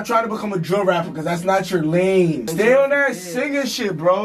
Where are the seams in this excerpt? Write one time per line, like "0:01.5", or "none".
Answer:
0:02.5